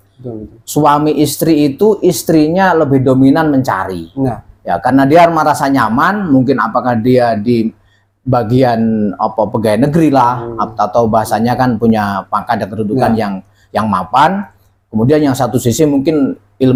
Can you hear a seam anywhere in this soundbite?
no; 0 cuts

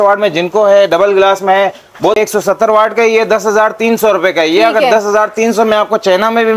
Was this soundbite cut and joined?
yes; 1 cut; at 2.2 s

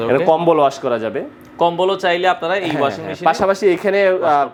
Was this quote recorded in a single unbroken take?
yes; 0 cuts

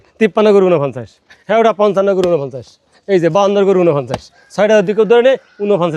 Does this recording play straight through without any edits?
yes; 0 cuts

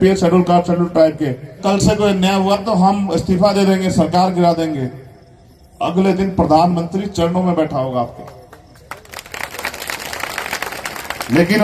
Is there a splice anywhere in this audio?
yes; 1 cut; at 1.6 s

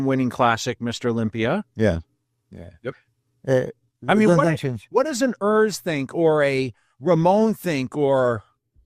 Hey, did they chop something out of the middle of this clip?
no; 0 cuts

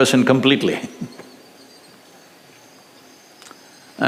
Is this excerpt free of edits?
yes; 0 cuts

